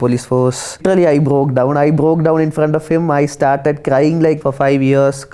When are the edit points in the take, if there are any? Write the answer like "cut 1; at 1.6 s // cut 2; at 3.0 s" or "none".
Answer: cut 1; at 0.8 s // cut 2; at 4.4 s